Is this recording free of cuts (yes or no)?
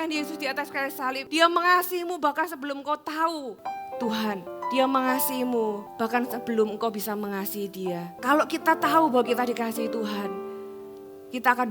no